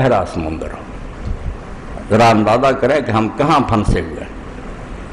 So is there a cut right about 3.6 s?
no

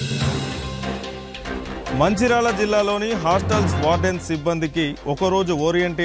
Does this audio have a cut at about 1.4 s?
no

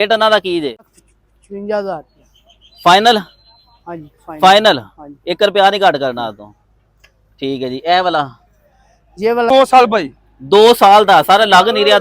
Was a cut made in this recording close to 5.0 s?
no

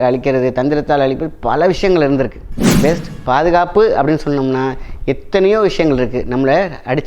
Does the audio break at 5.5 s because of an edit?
no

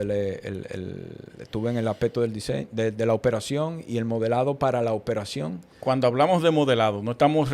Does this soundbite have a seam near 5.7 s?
no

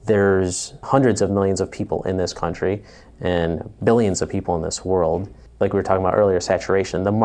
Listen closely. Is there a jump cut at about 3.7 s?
no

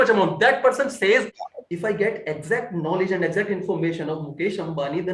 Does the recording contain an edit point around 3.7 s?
no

